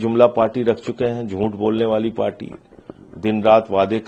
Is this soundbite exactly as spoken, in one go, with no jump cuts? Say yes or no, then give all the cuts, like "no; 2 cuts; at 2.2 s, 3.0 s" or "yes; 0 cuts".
yes; 0 cuts